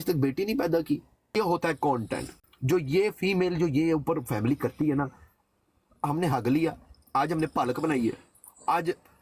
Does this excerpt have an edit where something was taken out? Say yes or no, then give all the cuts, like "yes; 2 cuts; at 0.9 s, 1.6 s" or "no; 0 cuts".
yes; 1 cut; at 1.3 s